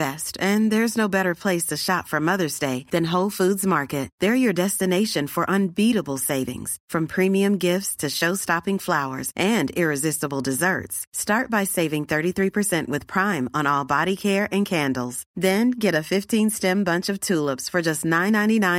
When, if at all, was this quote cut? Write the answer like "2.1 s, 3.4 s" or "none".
none